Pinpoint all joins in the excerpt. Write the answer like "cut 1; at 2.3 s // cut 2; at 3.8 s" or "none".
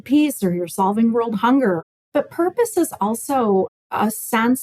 cut 1; at 1.8 s

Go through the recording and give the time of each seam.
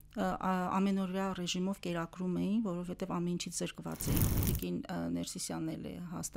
cut 1; at 4.4 s

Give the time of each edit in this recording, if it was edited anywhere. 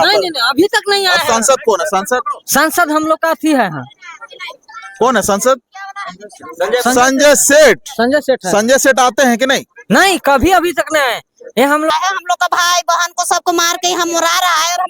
cut 1; at 11.9 s

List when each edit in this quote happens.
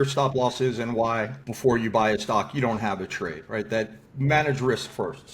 cut 1; at 1.4 s

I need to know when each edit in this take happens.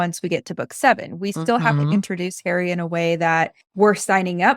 cut 1; at 3.6 s

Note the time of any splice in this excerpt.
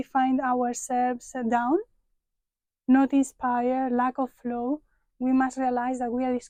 none

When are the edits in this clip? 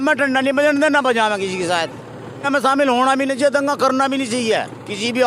cut 1; at 2.4 s

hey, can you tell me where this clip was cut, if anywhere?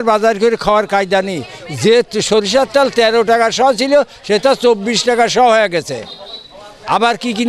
none

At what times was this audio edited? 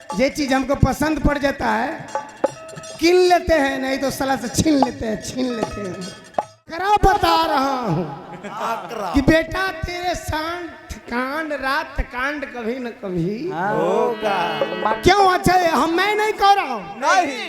cut 1; at 6.8 s

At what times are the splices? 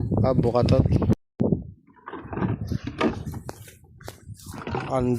cut 1; at 1.1 s

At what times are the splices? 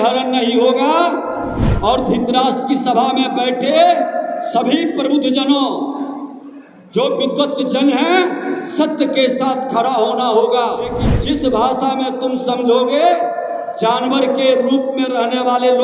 cut 1; at 11.1 s

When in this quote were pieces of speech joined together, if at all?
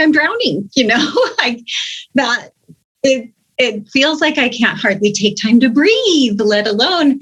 none

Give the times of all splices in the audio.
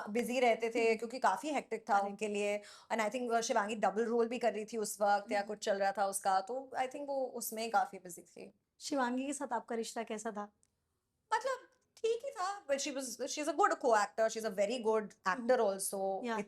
none

